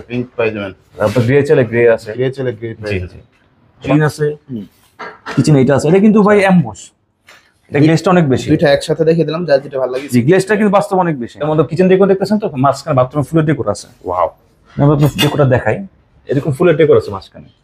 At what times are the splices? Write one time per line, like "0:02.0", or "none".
0:03.9
0:11.4